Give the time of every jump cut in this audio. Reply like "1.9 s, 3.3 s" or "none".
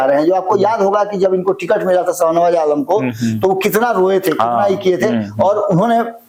none